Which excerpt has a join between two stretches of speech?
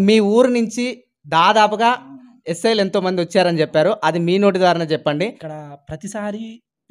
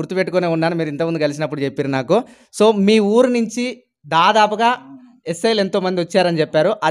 first; 1 cut; at 5.4 s

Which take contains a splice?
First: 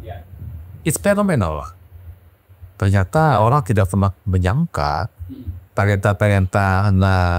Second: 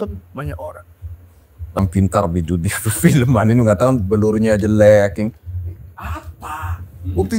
second; 1 cut; at 1.8 s

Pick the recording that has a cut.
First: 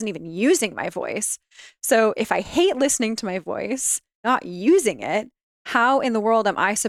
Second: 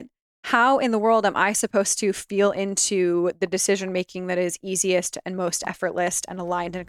first; 1 cut; at 4.2 s

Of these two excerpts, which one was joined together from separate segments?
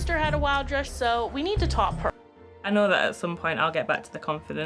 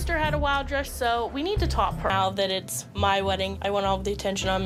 first; 1 cut; at 2.1 s

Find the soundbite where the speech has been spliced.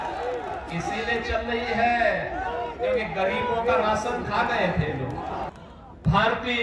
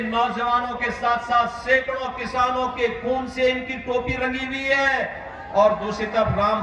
first; 1 cut; at 5.5 s

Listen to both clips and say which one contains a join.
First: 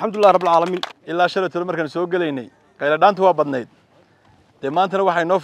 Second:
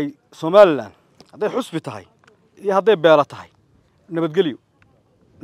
first; 1 cut; at 0.9 s

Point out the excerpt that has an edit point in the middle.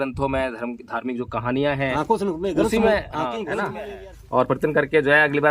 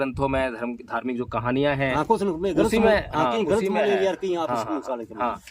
first; 1 cut; at 3.8 s

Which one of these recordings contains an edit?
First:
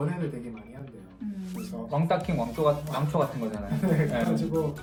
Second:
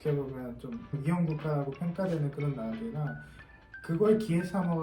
second; 1 cut; at 0.9 s

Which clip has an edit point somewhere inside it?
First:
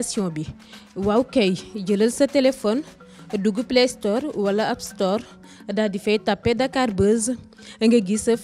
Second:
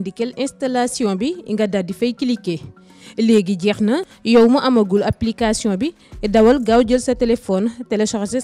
second; 1 cut; at 4.1 s

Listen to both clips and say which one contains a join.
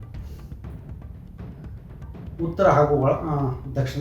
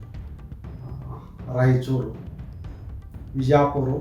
first; 2 cuts; at 0.9 s, 2.1 s

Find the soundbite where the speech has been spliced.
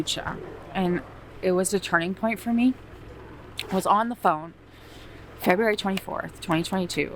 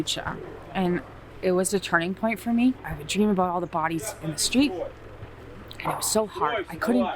second; 1 cut; at 2.9 s

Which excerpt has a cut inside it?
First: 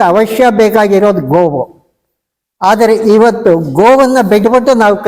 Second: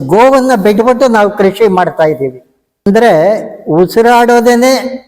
second; 1 cut; at 2.9 s

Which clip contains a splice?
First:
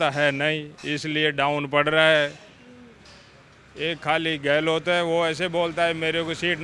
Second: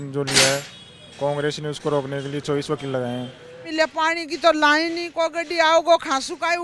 second; 1 cut; at 3.6 s

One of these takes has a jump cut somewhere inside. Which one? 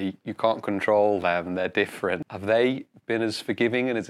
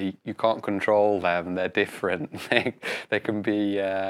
first; 1 cut; at 2.3 s

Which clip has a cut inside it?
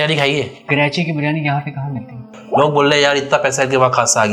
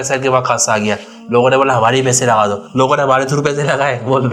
first; 1 cut; at 2.3 s

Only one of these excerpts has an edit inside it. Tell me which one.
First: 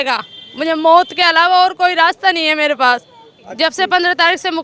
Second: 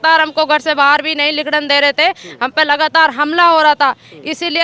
first; 1 cut; at 3.5 s

